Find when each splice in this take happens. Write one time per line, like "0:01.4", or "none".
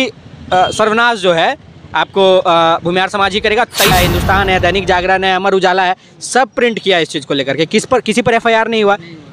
0:03.9